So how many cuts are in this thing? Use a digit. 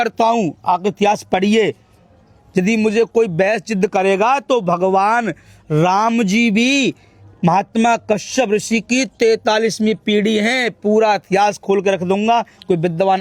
0